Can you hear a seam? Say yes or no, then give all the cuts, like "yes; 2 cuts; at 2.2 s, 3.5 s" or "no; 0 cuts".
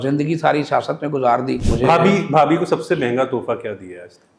yes; 1 cut; at 1.6 s